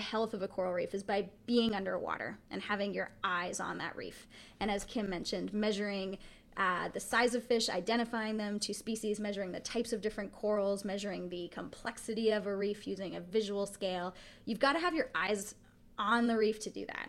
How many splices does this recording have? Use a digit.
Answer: 0